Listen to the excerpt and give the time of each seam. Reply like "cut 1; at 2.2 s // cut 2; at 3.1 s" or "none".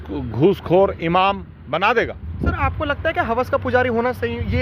cut 1; at 2.3 s